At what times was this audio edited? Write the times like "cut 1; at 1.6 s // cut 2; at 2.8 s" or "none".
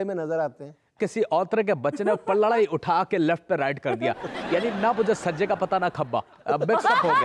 cut 1; at 1.0 s